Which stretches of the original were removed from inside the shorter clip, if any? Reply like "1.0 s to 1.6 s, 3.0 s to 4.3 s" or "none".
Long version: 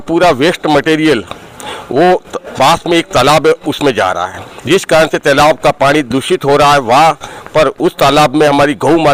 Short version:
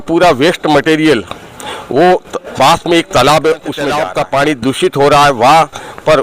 4.0 s to 5.5 s